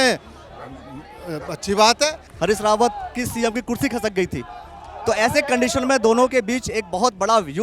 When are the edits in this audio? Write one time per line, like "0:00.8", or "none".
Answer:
0:02.2